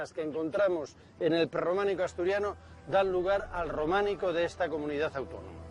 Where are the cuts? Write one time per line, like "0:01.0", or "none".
0:02.0